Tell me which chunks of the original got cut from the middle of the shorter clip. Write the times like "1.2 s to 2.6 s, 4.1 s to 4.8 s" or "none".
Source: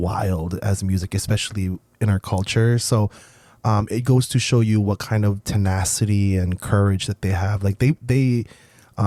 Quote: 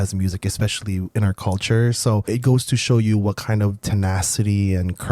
1.8 s to 1.9 s, 3.1 s to 3.9 s